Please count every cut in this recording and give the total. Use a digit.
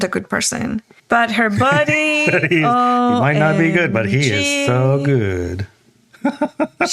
1